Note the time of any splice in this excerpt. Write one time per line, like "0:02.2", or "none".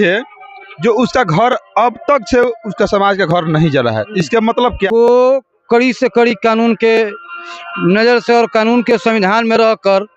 0:04.9